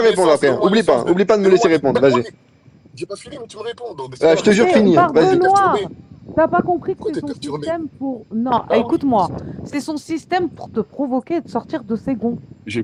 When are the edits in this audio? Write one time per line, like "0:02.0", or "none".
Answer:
none